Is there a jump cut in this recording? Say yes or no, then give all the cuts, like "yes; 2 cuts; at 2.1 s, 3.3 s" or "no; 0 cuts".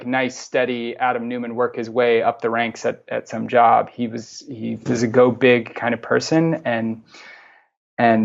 no; 0 cuts